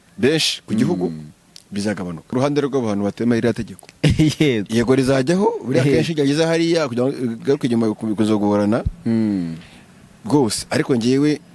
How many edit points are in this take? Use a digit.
1